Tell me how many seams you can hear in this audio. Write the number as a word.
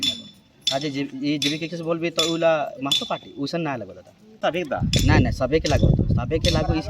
one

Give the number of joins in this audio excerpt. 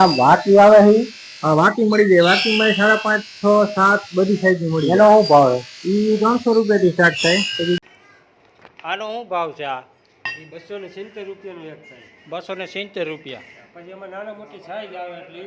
one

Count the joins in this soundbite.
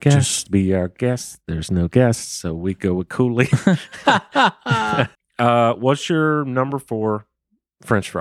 one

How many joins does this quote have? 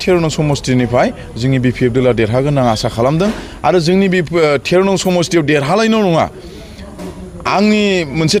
zero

